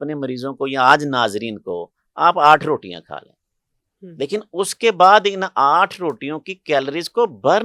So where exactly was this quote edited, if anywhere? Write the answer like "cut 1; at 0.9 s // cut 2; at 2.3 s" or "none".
none